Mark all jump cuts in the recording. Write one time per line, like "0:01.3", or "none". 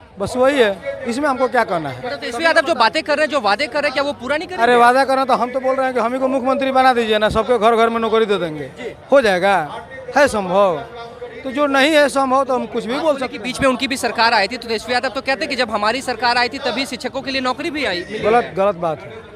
none